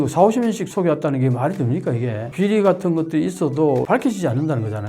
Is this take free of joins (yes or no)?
no